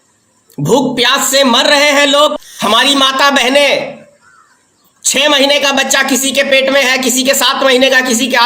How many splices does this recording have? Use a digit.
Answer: 1